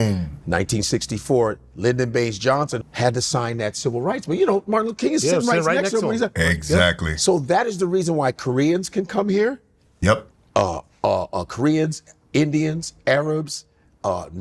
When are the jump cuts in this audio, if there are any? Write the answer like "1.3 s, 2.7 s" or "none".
2.8 s